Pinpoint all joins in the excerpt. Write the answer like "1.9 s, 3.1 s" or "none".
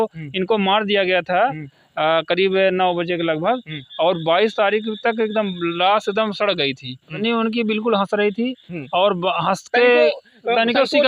7.1 s